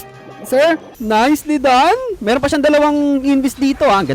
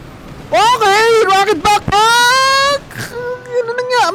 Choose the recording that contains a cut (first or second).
first